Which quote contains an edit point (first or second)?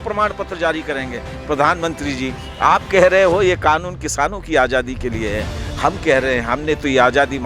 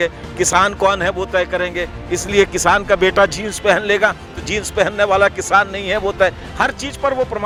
first